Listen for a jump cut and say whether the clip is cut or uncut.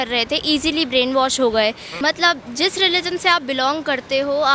cut